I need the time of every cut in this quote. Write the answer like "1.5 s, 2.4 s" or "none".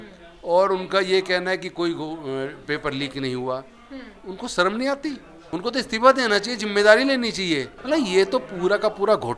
5.3 s, 7.7 s